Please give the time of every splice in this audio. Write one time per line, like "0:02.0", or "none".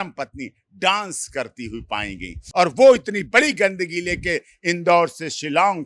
0:02.4

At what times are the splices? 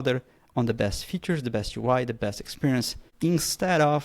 0:03.0

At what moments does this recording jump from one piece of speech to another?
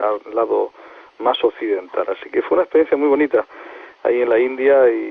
none

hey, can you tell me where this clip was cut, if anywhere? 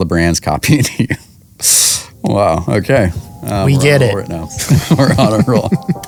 none

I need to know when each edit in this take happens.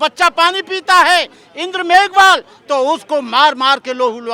none

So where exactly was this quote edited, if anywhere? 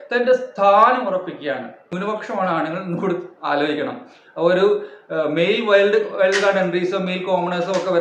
0:01.9

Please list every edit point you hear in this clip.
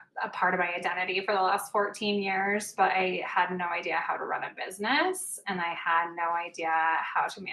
none

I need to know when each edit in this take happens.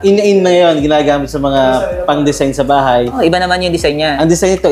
0:03.1

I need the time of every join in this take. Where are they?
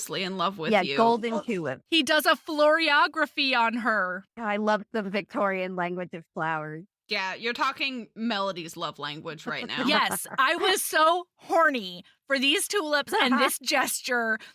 0:04.2
0:07.0

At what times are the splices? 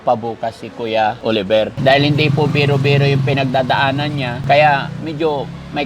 0:01.4
0:04.4

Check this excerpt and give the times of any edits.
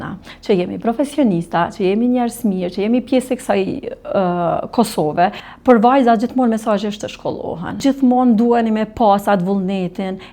0:05.5
0:07.8

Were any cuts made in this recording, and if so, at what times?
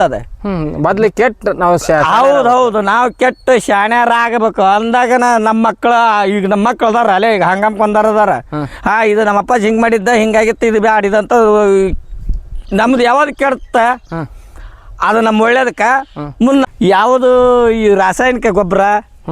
0:16.7

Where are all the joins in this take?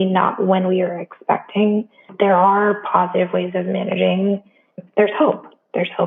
0:02.1
0:04.7

